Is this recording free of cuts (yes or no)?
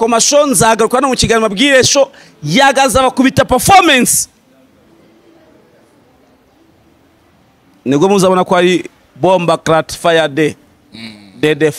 yes